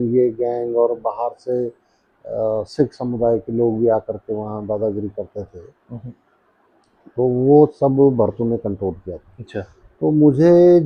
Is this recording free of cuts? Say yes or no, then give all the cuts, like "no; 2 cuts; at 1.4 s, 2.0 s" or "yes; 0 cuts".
yes; 0 cuts